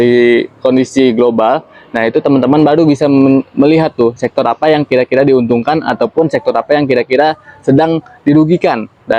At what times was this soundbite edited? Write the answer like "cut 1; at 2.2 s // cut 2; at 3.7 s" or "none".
none